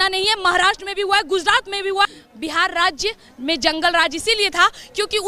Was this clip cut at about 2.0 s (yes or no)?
yes